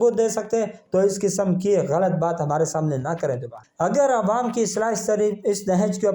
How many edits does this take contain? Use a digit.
1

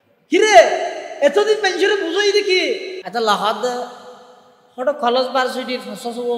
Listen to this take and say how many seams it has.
1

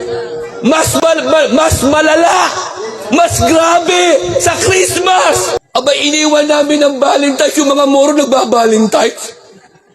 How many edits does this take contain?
1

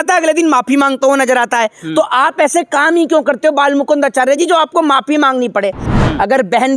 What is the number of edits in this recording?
1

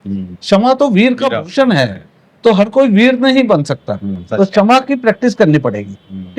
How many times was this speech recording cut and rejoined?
0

